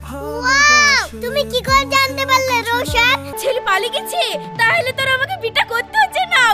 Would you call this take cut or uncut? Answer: cut